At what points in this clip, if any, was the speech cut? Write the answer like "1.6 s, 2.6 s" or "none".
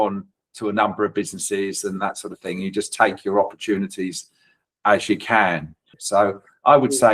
5.9 s